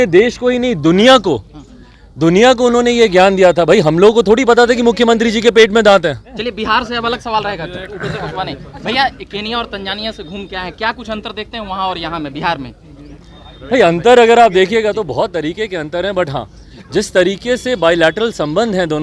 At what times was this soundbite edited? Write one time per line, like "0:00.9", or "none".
0:06.4